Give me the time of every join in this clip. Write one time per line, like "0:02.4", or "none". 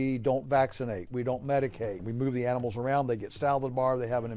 0:02.1